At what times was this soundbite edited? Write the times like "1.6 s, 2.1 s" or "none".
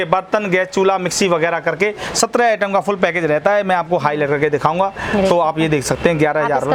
none